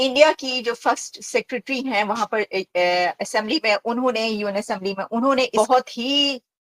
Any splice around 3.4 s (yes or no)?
no